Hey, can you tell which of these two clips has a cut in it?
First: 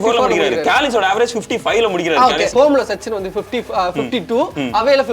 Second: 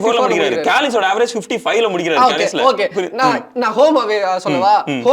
first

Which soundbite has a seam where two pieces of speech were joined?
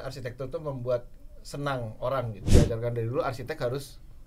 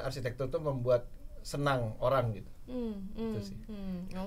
first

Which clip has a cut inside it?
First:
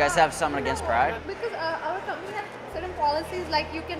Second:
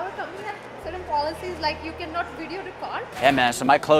second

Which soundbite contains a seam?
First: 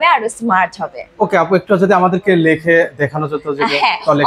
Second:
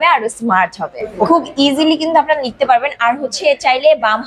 second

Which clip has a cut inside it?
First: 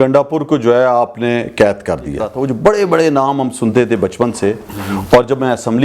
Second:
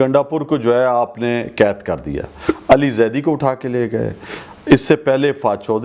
first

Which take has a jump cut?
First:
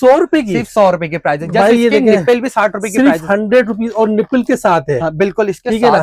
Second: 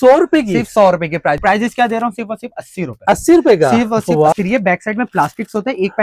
second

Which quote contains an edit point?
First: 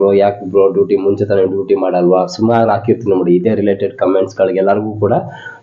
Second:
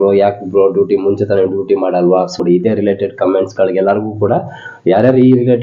second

